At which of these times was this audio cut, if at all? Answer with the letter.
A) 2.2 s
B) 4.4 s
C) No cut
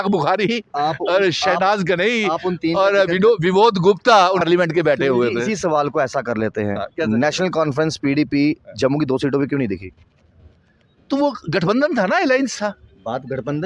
B